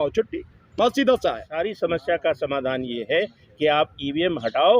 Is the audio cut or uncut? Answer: cut